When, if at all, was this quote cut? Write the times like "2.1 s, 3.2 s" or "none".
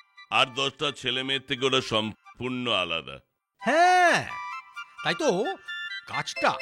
none